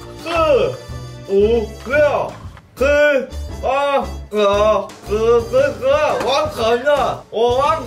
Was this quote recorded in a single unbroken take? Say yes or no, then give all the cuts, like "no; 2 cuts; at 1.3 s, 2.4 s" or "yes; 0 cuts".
yes; 0 cuts